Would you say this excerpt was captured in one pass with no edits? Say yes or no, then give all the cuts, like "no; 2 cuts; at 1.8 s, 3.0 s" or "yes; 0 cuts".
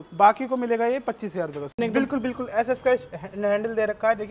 no; 1 cut; at 1.8 s